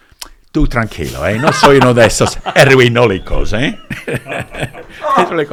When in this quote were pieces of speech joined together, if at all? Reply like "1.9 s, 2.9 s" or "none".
none